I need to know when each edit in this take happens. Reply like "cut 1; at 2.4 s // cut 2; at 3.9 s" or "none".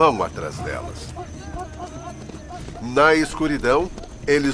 none